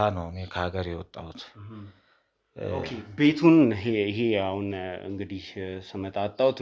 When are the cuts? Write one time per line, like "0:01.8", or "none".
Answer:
none